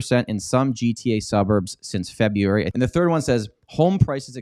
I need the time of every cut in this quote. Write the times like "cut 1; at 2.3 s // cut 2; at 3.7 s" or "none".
cut 1; at 2.7 s